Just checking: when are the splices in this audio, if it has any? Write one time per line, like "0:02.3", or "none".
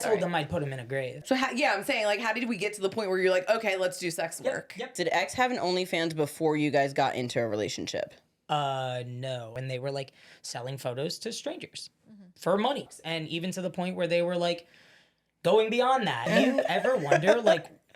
0:01.2
0:04.9
0:09.5
0:12.9
0:16.3